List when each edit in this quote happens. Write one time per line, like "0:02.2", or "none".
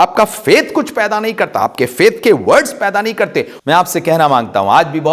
0:03.5